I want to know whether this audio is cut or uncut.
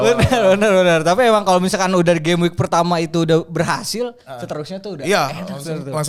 uncut